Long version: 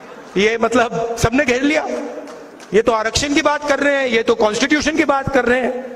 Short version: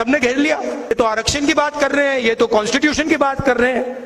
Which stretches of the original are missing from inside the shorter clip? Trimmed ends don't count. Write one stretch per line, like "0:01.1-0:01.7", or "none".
0:02.2-0:02.8

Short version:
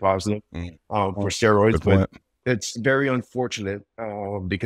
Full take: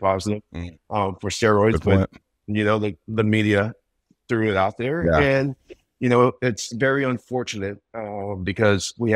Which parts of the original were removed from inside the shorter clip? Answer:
0:02.4-0:06.4

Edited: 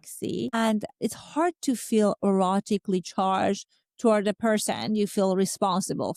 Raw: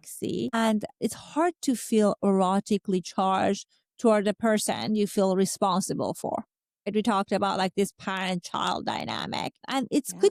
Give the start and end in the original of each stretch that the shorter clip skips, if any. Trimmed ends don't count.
none

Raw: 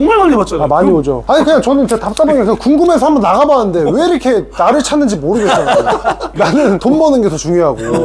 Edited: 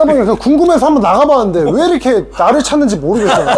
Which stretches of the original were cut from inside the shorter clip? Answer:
none

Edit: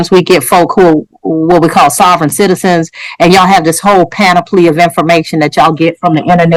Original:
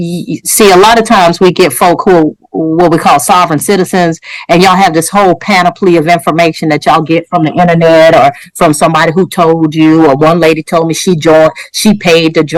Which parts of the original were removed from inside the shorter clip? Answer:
none

